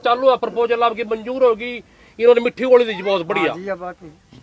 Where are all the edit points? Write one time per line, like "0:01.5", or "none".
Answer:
none